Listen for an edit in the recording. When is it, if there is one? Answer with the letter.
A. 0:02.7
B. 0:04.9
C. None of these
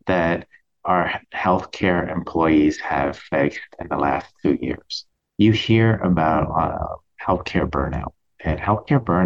B